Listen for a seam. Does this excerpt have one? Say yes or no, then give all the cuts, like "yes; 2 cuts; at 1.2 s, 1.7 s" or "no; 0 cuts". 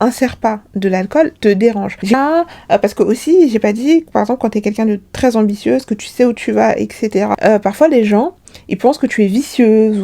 yes; 1 cut; at 2.1 s